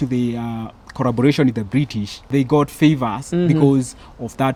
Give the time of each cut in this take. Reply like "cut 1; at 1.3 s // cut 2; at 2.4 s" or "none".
none